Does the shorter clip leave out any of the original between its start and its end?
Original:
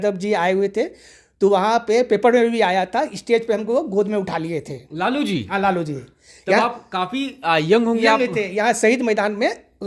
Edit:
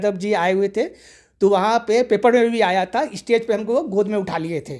no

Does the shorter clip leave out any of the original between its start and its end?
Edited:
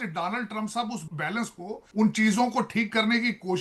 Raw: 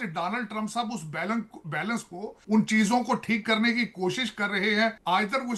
yes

